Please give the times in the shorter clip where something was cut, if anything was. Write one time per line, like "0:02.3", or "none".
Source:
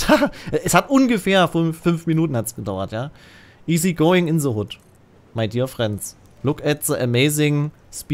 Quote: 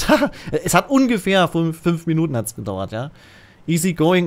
none